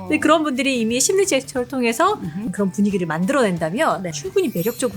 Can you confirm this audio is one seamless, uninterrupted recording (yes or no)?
no